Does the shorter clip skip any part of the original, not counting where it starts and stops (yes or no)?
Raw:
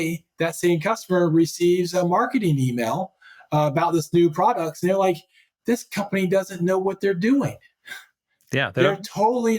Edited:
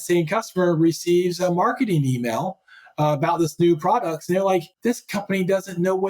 yes